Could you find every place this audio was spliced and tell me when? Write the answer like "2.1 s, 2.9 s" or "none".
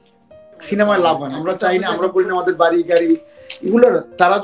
1.3 s